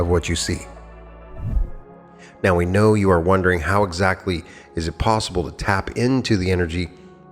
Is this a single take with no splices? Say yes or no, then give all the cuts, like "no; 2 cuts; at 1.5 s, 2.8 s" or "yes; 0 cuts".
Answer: no; 1 cut; at 1.5 s